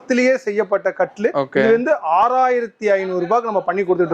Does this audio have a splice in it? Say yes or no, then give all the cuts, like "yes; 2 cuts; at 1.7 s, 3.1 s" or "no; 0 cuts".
no; 0 cuts